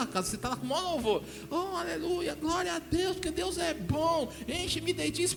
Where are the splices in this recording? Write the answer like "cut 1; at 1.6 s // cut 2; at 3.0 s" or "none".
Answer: none

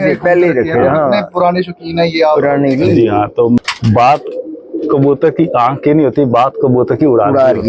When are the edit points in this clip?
cut 1; at 3.6 s

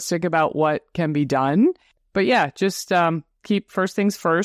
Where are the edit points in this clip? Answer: cut 1; at 1.9 s

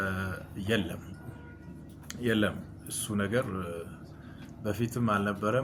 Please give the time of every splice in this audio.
none

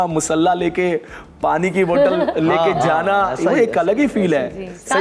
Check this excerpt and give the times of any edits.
none

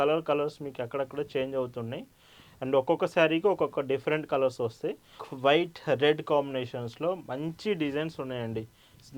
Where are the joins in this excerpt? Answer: cut 1; at 5.2 s

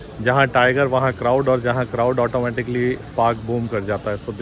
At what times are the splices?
none

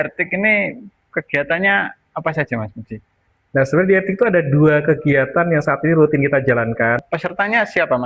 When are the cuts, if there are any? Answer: cut 1; at 7.0 s

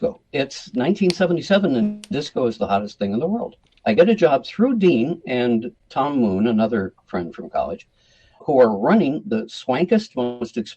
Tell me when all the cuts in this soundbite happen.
cut 1; at 3.7 s // cut 2; at 5.8 s // cut 3; at 8.4 s

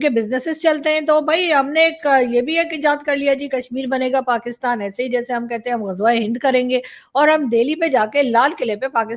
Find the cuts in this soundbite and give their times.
none

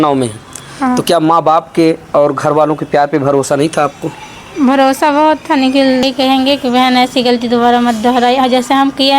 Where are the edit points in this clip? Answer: cut 1; at 6.0 s

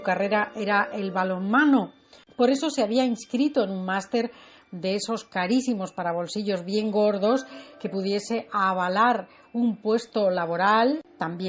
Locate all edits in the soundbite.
none

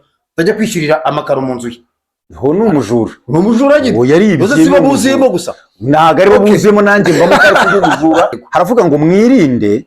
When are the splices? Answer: cut 1; at 8.4 s

